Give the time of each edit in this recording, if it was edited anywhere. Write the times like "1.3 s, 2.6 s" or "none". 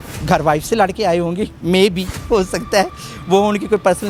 none